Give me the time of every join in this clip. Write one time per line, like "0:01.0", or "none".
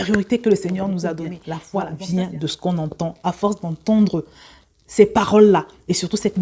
0:01.5

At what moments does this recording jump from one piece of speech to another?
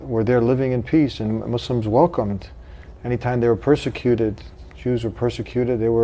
none

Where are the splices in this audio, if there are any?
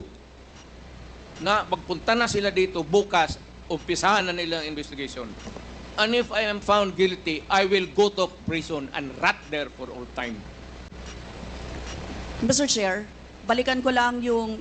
none

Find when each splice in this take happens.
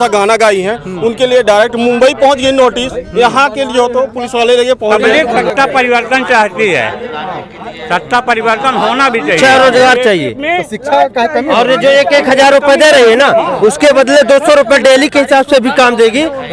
0:05.0
0:09.4

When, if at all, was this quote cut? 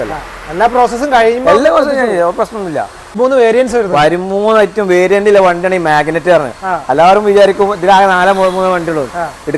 0:03.0

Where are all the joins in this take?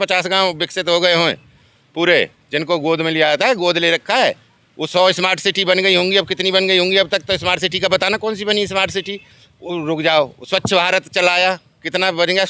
none

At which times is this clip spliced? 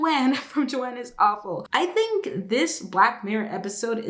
0:01.6

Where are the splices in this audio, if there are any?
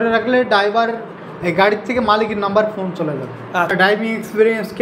0:03.7

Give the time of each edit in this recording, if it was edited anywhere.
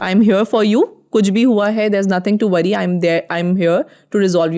none

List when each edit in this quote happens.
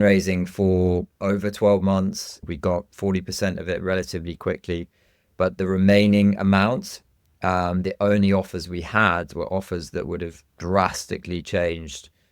0:02.4

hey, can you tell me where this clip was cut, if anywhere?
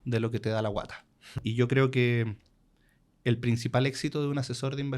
0:01.3

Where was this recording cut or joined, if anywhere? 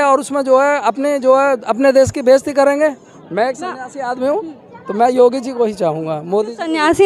0:03.1

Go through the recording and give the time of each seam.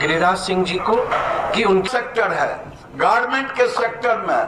0:01.8

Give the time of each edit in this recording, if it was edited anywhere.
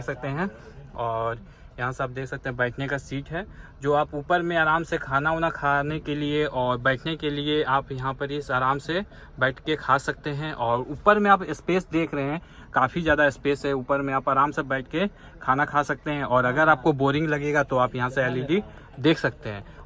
none

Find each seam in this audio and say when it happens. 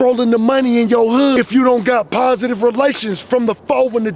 0:01.4

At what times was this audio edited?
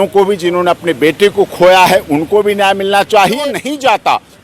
0:03.4

